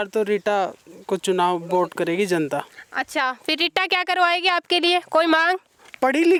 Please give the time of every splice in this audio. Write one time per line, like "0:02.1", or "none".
none